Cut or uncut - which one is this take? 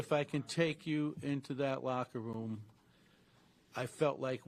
uncut